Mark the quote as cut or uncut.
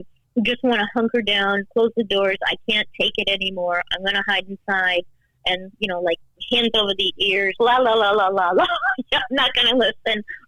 uncut